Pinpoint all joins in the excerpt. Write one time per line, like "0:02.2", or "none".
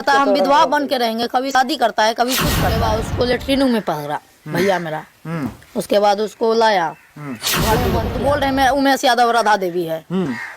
0:01.5
0:02.8
0:08.1